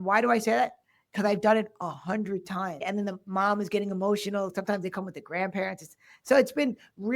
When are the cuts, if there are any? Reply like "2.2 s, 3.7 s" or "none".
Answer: 2.8 s